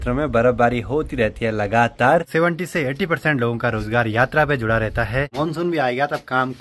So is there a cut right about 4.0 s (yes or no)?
no